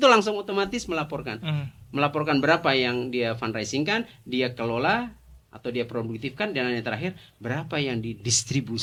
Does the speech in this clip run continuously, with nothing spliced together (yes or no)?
yes